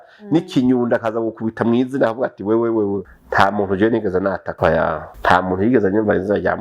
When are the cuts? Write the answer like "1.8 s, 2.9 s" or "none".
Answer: 3.0 s, 4.9 s

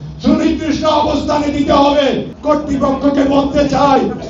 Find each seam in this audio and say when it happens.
2.3 s

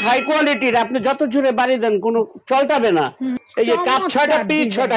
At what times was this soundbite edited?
3.4 s

